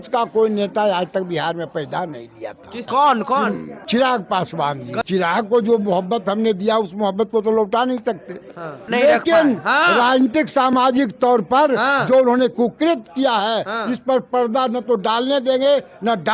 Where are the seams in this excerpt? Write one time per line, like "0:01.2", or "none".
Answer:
0:02.8
0:03.7
0:05.0
0:08.8